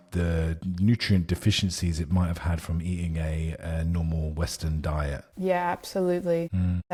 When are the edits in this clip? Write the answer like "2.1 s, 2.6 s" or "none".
none